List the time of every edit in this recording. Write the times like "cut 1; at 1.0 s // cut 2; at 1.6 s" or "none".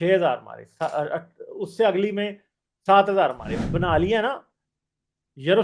cut 1; at 3.5 s